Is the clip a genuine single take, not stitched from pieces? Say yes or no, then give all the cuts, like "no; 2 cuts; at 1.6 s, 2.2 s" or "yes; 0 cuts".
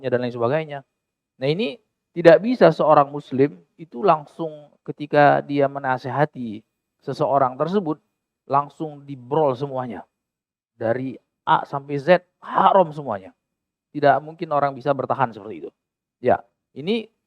yes; 0 cuts